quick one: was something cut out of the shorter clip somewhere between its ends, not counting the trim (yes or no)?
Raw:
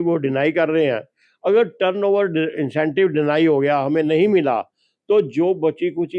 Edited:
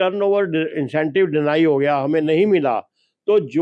no